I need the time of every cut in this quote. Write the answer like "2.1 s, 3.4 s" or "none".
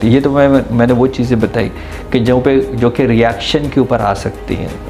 none